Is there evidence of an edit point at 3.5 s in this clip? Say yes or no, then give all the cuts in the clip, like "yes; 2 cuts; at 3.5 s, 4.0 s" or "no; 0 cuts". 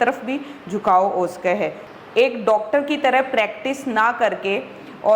no; 1 cut; at 1.8 s